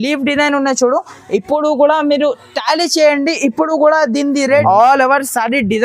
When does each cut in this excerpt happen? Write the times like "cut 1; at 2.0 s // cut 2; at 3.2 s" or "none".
cut 1; at 4.6 s